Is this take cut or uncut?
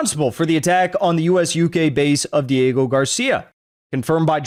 uncut